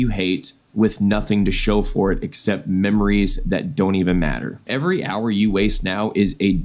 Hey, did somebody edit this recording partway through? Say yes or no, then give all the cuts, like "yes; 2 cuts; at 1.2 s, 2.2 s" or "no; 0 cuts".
yes; 1 cut; at 4.7 s